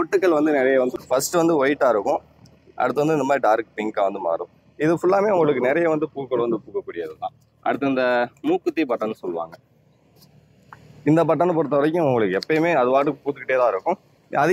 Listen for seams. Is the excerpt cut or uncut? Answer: cut